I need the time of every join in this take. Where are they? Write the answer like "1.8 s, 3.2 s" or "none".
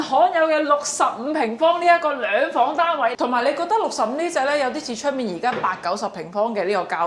3.1 s